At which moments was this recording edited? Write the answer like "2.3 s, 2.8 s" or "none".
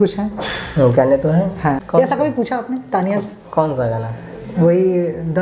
1.8 s